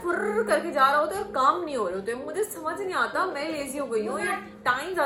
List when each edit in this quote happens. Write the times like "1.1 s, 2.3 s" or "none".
none